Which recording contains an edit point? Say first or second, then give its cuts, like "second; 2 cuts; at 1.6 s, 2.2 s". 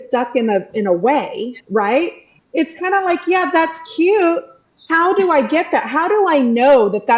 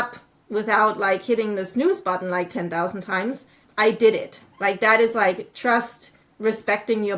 second; 1 cut; at 3.5 s